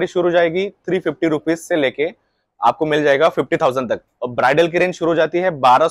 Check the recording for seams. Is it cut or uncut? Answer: uncut